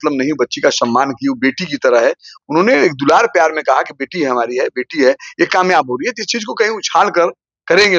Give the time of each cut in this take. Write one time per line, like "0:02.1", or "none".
0:02.3